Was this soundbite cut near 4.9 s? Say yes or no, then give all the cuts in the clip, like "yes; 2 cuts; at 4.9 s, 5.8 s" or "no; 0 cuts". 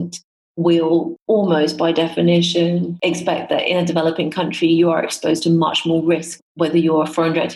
no; 3 cuts; at 1.1 s, 2.9 s, 6.4 s